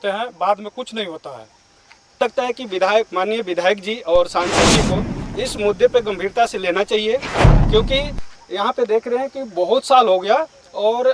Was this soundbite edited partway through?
yes; 1 cut; at 2.2 s

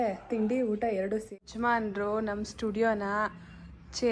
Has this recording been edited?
yes; 1 cut; at 1.3 s

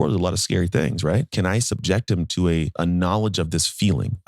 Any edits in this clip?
yes; 2 cuts; at 1.3 s, 2.8 s

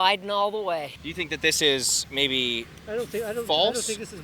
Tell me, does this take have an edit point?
yes; 1 cut; at 1.0 s

